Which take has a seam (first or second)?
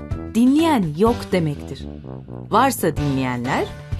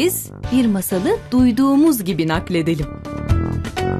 second